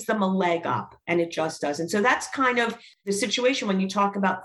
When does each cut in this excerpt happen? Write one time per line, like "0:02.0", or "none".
0:03.0